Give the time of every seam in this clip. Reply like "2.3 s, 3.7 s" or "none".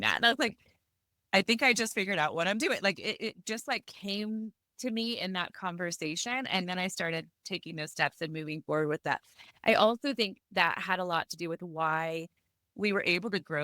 3.9 s